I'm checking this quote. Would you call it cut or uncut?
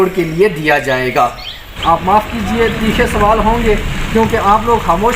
cut